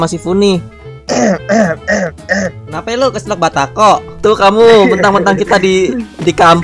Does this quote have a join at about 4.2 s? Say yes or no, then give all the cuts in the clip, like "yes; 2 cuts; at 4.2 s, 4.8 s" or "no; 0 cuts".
yes; 1 cut; at 4.2 s